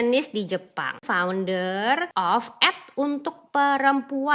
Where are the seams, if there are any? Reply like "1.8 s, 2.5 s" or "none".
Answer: 1.0 s, 2.1 s